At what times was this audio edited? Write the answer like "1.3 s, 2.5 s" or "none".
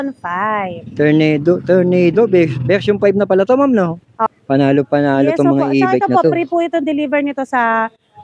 4.2 s

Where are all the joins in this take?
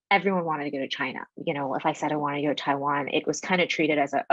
1.3 s

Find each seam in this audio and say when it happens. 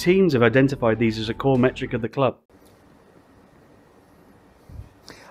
2.4 s

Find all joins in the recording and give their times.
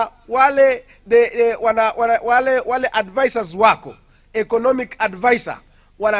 4.6 s

